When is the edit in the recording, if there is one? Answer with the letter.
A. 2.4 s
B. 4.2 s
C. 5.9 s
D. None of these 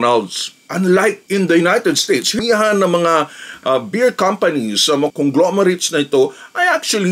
A